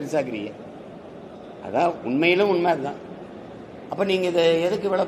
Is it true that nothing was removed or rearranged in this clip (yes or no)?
yes